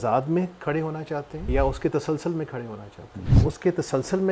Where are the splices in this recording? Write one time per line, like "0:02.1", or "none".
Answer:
0:01.4
0:03.4